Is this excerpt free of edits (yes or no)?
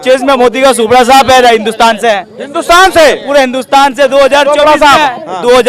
yes